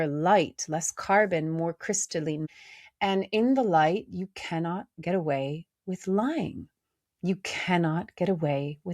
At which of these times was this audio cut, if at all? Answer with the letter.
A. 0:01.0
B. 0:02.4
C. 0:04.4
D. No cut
B